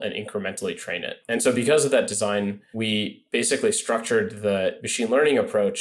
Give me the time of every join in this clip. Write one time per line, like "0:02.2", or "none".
0:01.1
0:02.6
0:04.8

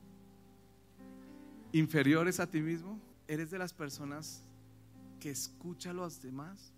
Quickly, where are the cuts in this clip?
0:03.2

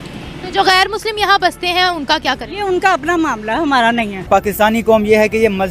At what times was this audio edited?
0:04.3

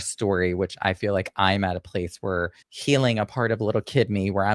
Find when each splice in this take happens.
0:02.6

